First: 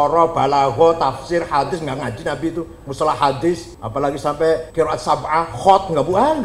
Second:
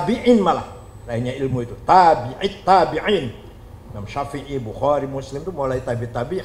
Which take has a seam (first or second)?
first